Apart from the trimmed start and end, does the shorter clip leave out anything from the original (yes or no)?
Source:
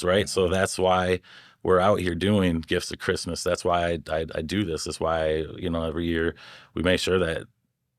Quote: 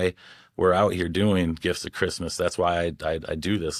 no